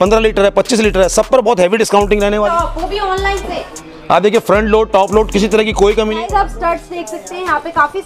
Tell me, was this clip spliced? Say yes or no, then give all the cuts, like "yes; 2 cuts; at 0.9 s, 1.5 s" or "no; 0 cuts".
yes; 2 cuts; at 2.5 s, 6.2 s